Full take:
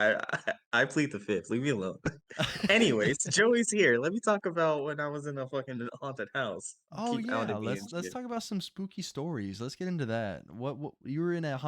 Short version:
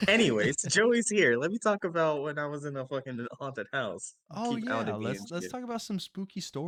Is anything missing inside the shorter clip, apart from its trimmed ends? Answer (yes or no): no